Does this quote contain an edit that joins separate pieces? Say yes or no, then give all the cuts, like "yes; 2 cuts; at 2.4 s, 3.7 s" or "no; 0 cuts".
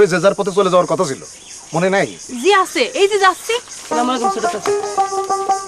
no; 0 cuts